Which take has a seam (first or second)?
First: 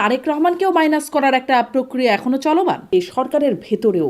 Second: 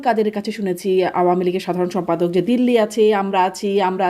first